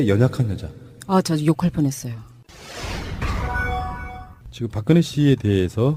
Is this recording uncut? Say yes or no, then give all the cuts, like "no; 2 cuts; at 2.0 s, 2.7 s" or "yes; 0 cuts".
yes; 0 cuts